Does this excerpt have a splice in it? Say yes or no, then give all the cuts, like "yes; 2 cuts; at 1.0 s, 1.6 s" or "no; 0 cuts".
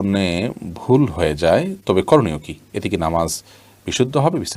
no; 0 cuts